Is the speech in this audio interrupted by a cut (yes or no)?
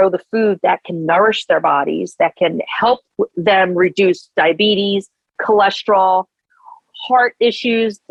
no